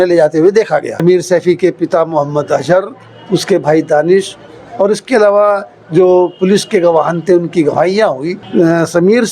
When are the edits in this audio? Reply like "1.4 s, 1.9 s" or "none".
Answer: 1.0 s, 8.3 s